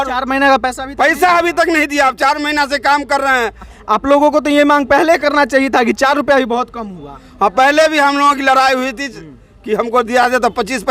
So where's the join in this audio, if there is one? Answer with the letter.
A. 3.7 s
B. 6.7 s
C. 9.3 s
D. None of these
A